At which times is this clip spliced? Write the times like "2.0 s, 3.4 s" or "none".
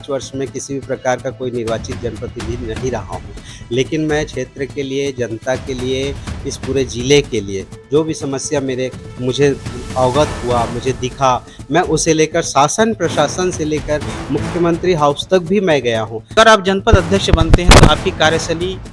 16.3 s